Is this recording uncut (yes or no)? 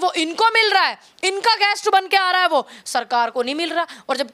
yes